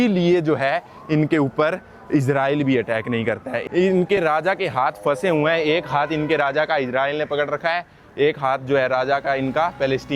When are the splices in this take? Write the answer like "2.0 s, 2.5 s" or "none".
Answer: 3.5 s